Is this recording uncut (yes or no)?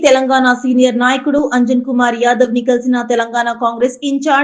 yes